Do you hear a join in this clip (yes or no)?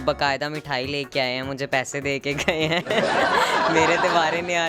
no